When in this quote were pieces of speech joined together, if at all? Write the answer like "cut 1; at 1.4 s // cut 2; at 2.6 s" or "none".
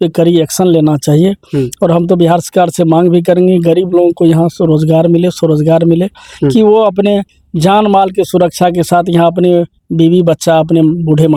none